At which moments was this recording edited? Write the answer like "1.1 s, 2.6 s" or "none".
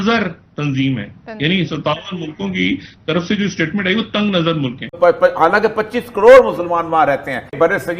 4.8 s